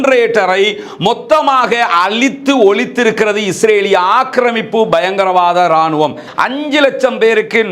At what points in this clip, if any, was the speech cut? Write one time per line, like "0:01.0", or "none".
0:06.3